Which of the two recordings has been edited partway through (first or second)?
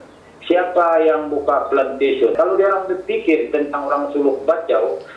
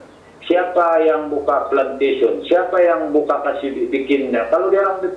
first